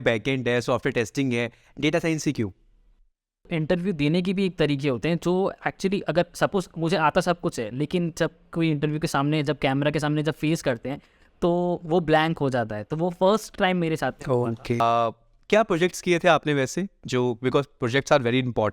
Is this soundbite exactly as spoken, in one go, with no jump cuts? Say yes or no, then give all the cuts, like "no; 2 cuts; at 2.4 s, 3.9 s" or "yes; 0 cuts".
no; 2 cuts; at 3.5 s, 14.8 s